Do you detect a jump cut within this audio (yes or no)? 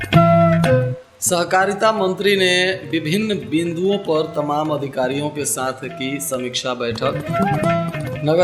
yes